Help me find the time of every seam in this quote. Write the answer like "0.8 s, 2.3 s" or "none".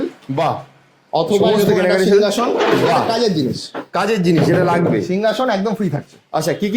none